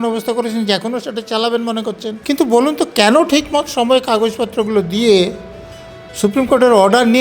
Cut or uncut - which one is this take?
cut